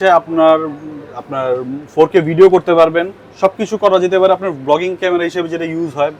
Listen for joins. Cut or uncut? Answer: uncut